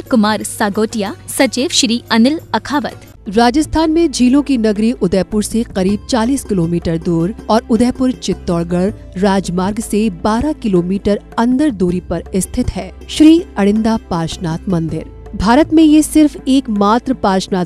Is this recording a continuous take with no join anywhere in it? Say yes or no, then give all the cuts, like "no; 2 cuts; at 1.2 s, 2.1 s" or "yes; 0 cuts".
no; 1 cut; at 3.1 s